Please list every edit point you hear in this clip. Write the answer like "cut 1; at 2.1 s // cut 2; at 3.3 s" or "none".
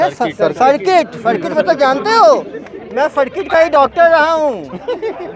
none